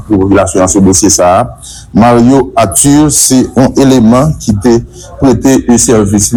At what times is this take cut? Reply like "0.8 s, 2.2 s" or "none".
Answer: none